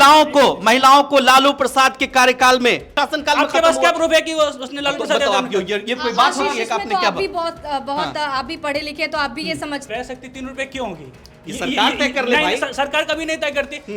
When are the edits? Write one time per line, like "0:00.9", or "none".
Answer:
0:03.0
0:09.9